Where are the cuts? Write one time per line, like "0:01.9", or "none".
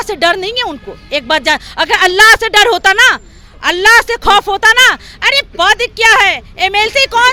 none